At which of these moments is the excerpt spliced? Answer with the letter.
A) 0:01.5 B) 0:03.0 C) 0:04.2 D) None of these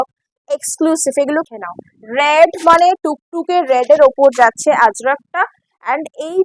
A